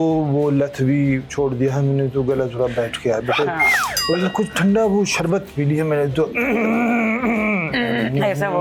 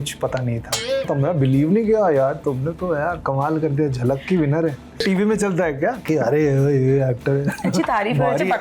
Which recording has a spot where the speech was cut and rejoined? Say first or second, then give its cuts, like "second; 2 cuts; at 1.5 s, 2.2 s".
second; 2 cuts; at 1.0 s, 5.0 s